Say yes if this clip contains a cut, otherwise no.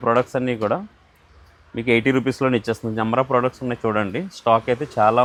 no